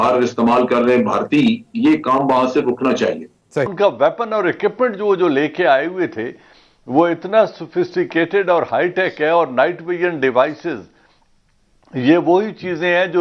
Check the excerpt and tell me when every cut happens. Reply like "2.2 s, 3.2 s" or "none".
3.7 s